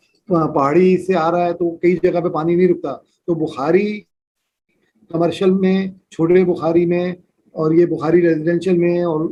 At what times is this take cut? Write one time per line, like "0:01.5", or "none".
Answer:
none